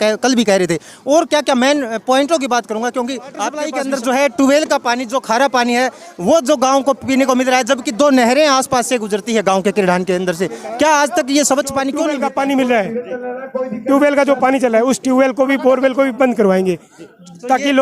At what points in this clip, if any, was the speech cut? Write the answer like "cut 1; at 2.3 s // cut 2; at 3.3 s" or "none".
cut 1; at 3.7 s // cut 2; at 12.0 s